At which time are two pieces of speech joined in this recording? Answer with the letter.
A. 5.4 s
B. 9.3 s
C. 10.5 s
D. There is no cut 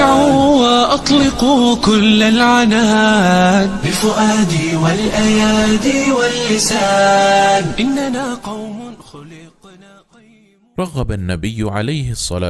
C